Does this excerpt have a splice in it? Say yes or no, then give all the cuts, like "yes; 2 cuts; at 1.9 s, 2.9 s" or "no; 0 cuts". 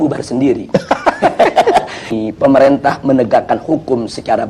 yes; 1 cut; at 2.2 s